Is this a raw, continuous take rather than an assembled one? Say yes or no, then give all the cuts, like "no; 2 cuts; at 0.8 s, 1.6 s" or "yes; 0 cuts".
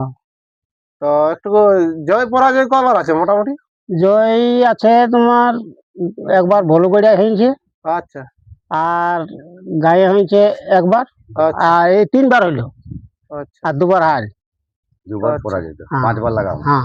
yes; 0 cuts